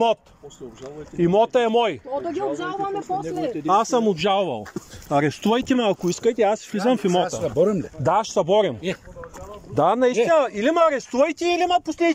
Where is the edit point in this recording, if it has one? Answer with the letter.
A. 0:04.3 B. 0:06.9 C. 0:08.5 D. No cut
D